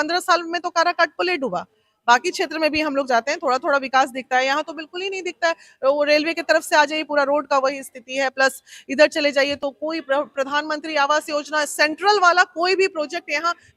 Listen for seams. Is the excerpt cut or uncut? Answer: uncut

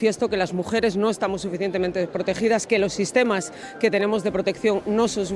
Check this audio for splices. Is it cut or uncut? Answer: uncut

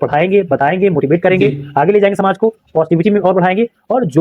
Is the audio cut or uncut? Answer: uncut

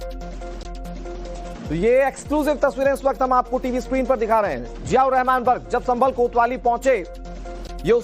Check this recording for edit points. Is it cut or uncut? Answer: cut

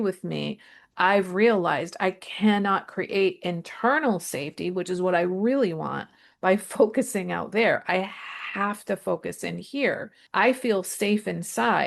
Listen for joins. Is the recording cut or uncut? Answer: cut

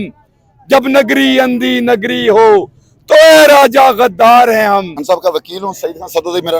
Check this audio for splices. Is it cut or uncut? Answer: cut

